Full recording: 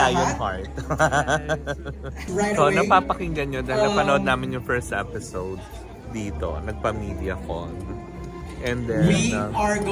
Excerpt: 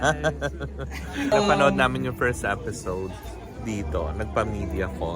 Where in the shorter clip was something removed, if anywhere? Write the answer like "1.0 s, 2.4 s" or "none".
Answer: 1.0 s